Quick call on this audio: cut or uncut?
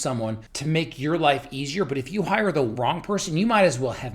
cut